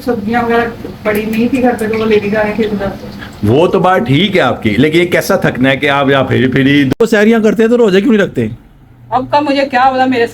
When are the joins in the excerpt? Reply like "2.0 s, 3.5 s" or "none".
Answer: 7.0 s